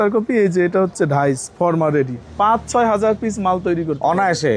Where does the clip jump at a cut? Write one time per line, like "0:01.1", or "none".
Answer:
0:02.3